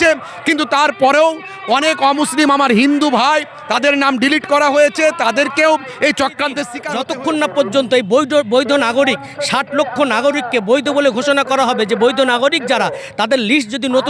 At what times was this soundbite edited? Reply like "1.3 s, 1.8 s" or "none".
6.8 s